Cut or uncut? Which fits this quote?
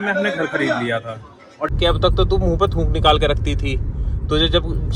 cut